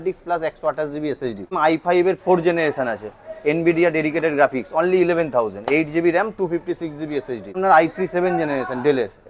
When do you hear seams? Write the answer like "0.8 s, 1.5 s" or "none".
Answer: 1.5 s, 7.6 s